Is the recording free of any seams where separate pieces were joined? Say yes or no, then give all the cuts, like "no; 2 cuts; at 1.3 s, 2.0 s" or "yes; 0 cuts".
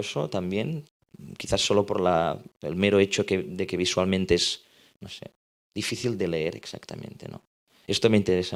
yes; 0 cuts